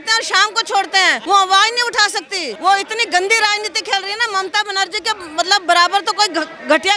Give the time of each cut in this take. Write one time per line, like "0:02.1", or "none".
0:01.2
0:02.4